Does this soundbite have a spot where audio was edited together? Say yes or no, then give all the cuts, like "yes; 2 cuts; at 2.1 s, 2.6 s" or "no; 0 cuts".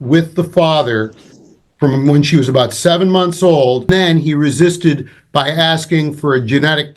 yes; 1 cut; at 3.9 s